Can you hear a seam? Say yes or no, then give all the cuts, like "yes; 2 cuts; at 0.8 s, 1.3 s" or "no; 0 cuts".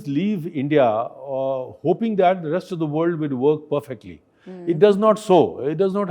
no; 0 cuts